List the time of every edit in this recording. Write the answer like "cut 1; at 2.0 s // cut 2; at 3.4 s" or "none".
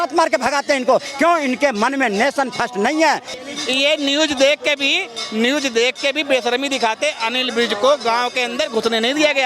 cut 1; at 3.4 s